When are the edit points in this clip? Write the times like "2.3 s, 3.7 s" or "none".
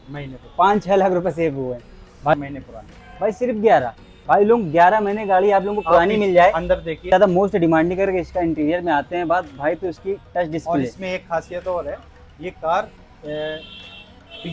2.3 s, 7.1 s